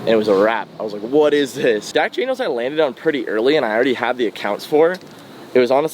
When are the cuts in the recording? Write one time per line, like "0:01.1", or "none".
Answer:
0:01.9

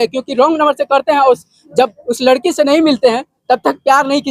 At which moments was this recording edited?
none

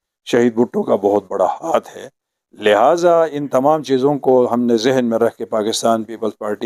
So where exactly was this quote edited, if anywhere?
none

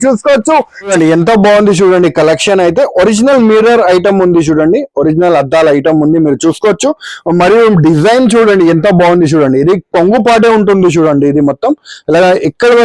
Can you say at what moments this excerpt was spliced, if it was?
0:00.9

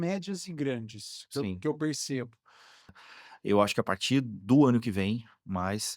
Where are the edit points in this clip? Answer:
0:03.0

